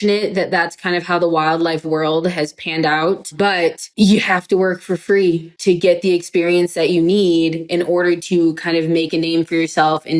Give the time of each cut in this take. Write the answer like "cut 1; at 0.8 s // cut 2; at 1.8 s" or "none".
none